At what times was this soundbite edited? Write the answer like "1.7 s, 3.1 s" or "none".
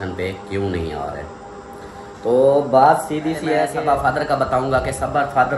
3.7 s